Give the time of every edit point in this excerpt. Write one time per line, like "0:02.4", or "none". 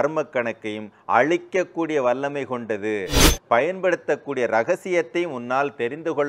0:03.2